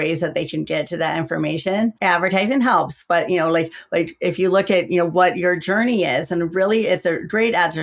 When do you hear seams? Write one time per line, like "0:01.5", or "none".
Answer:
0:02.0